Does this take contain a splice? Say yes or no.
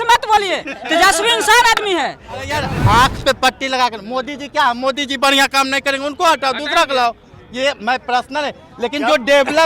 yes